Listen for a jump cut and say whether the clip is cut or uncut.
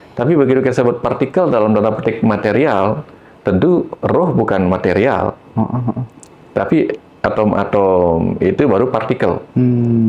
uncut